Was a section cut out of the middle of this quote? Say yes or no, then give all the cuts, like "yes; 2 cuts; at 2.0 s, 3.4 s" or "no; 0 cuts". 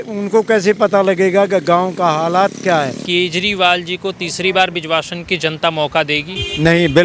yes; 1 cut; at 3.0 s